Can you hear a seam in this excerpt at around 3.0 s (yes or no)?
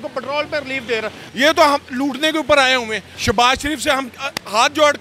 yes